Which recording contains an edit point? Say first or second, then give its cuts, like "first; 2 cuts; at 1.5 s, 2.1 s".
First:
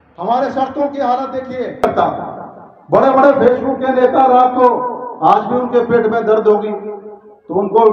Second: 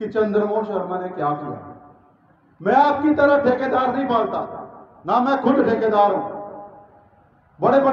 first; 1 cut; at 1.8 s